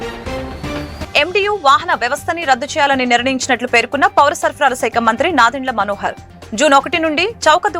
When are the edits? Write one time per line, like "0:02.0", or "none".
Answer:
0:01.0